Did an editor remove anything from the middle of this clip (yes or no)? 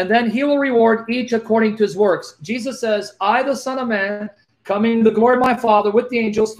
no